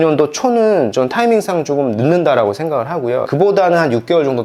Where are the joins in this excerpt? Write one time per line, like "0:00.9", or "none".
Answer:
0:03.3